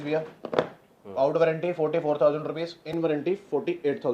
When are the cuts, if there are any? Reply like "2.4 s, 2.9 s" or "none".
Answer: none